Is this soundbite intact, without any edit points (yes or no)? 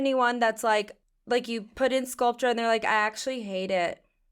no